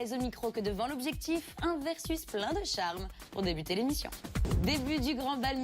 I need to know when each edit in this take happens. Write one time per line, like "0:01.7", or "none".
0:01.4